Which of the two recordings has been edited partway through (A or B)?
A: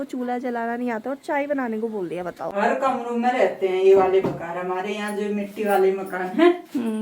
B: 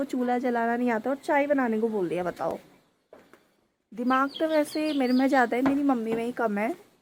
A